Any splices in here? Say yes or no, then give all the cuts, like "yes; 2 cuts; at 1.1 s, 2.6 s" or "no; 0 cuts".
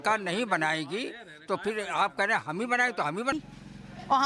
yes; 1 cut; at 3.3 s